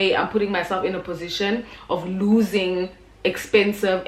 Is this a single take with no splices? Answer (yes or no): yes